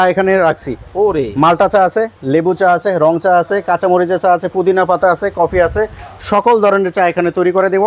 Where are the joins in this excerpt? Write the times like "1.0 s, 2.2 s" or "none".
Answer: none